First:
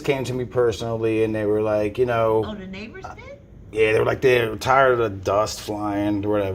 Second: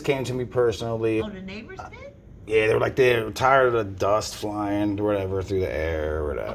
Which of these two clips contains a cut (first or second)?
second